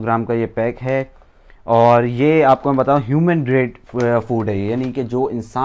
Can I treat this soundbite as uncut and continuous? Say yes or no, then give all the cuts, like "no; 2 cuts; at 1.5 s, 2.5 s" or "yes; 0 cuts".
yes; 0 cuts